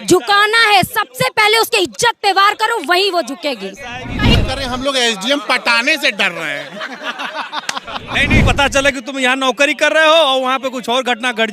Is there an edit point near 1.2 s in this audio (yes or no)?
no